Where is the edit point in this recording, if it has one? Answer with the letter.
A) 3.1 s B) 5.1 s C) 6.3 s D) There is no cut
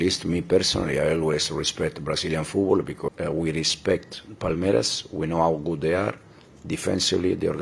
A